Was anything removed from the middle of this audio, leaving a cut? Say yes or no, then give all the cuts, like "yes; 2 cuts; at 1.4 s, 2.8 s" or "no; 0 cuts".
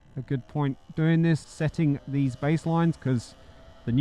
yes; 1 cut; at 1.4 s